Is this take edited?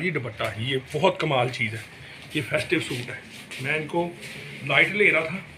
no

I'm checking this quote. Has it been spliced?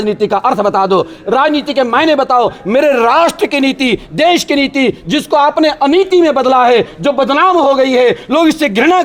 no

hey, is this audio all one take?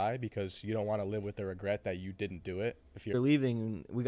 no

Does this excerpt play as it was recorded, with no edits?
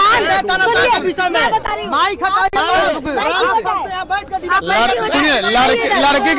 yes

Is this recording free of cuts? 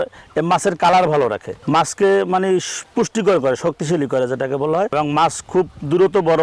no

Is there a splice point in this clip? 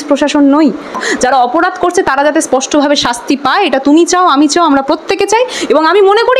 yes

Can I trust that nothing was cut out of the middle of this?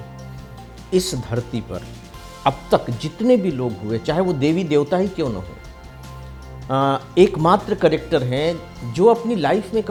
yes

